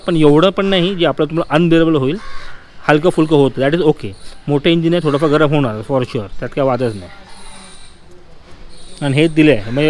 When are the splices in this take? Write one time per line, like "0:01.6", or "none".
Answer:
none